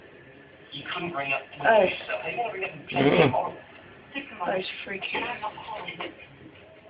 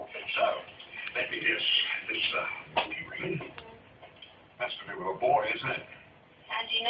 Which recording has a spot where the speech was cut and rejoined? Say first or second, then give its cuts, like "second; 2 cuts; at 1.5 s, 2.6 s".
first; 1 cut; at 4.4 s